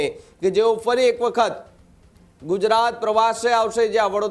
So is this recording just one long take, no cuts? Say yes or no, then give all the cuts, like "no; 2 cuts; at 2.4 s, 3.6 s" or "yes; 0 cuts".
yes; 0 cuts